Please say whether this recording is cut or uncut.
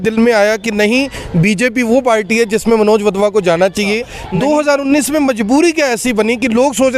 cut